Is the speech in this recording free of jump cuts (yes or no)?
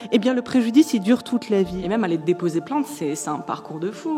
no